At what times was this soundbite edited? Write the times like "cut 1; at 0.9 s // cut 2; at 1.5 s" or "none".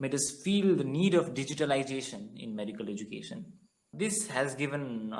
cut 1; at 3.9 s